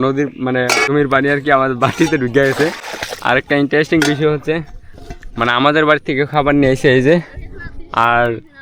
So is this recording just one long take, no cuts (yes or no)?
no